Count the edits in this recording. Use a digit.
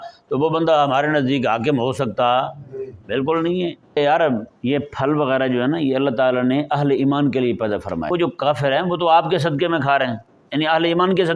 2